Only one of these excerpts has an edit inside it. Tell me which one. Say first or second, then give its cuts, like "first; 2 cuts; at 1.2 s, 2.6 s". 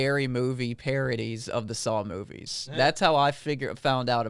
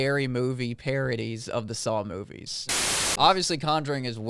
second; 1 cut; at 2.7 s